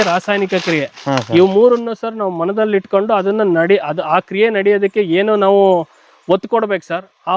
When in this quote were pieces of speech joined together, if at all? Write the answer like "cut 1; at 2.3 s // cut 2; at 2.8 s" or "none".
none